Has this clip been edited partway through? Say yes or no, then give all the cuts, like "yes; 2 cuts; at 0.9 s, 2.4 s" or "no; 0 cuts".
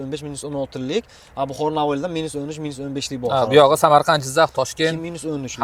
no; 0 cuts